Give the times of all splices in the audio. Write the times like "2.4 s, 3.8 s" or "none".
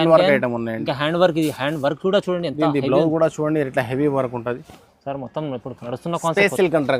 4.7 s